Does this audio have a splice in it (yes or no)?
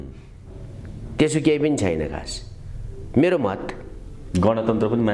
no